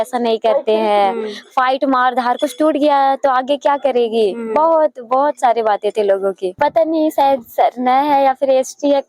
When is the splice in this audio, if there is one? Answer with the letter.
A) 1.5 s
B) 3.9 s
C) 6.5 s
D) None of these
C